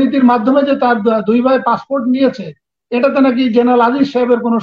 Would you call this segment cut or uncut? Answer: uncut